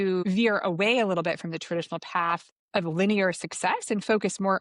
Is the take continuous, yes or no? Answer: yes